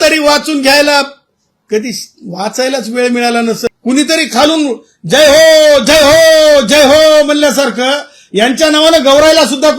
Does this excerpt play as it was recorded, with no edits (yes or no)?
no